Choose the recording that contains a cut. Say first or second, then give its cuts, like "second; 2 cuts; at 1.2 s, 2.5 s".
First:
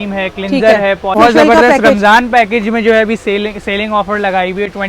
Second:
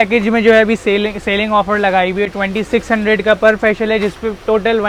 first; 1 cut; at 1.1 s